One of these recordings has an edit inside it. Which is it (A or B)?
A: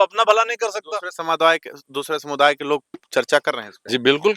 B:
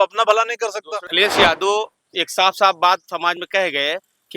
B